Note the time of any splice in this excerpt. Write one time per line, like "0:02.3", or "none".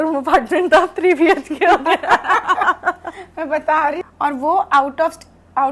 0:04.0